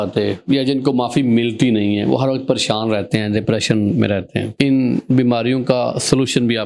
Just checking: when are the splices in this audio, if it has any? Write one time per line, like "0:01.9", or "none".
none